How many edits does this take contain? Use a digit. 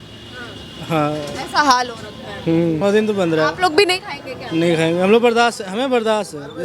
1